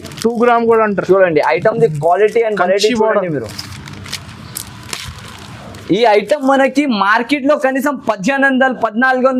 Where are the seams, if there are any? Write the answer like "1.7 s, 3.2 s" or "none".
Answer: none